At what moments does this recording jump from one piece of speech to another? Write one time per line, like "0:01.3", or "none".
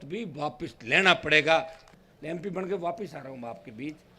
0:01.8